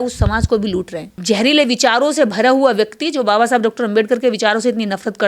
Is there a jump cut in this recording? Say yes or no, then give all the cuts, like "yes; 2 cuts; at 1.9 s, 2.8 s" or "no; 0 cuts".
yes; 1 cut; at 1.1 s